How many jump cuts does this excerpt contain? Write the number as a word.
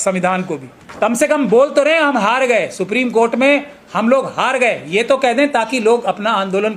one